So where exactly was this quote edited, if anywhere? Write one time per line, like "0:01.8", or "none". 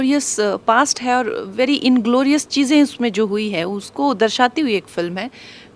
none